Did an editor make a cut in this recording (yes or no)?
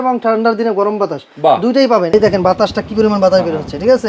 yes